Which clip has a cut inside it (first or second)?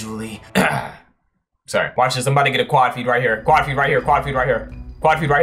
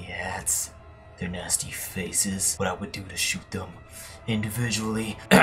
first